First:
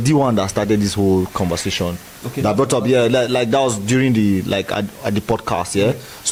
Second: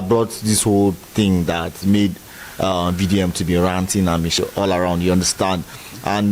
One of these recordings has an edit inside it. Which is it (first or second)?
second